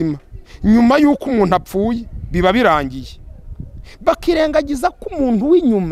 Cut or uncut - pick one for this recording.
uncut